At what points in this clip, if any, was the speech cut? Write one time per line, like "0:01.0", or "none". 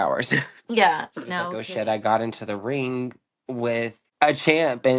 0:01.6
0:04.0